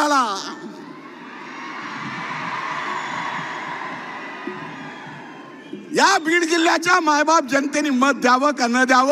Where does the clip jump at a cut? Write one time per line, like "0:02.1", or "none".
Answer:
none

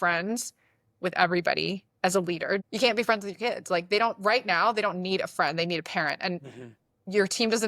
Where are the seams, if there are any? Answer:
0:02.6

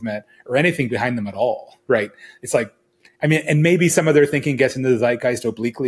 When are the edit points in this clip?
none

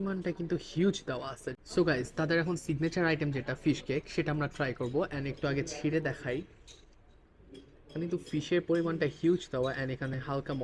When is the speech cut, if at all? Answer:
0:01.4

